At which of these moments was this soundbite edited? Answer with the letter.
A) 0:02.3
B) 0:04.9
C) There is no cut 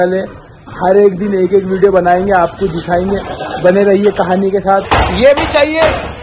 B